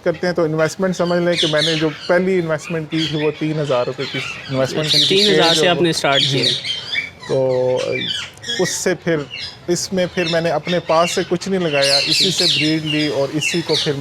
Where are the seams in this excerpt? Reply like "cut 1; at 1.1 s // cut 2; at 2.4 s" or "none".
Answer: none